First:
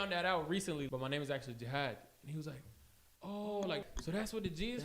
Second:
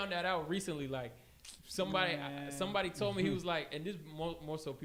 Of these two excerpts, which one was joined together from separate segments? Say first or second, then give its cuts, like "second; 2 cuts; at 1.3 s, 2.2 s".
first; 2 cuts; at 0.9 s, 3.9 s